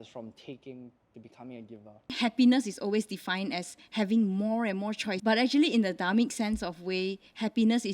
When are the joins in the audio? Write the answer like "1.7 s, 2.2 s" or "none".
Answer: 2.2 s, 5.1 s